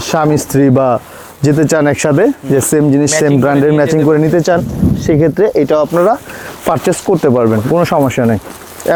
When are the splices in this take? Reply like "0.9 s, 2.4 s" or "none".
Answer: none